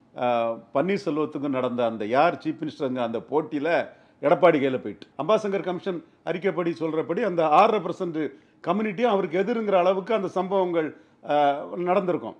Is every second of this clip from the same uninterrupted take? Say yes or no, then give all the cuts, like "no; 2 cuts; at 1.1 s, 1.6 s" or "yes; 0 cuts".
no; 1 cut; at 5.1 s